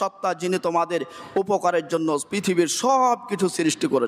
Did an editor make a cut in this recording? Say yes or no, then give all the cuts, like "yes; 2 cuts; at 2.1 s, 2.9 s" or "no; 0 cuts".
no; 0 cuts